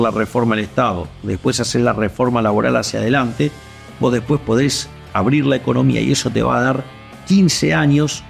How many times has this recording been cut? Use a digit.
0